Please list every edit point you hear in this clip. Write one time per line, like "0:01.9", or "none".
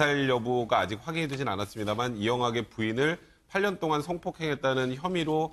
0:04.2